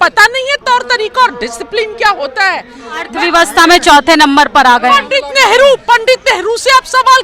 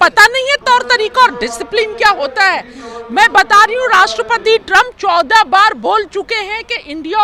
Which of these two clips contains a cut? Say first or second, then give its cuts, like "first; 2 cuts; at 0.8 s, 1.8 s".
first; 1 cut; at 3.1 s